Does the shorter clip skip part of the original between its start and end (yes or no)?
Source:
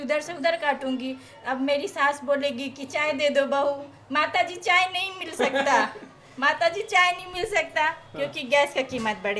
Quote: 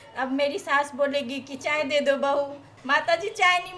yes